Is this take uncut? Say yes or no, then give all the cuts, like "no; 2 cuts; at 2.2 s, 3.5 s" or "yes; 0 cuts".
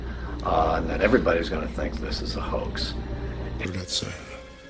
yes; 0 cuts